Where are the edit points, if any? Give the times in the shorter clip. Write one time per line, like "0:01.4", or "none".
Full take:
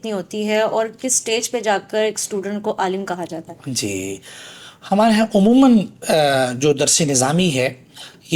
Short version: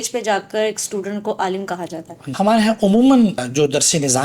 0:02.2
0:03.5